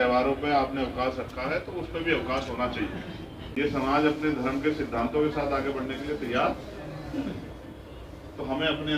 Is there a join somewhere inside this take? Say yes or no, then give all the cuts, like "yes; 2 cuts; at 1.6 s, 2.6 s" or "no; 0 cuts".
yes; 1 cut; at 3.4 s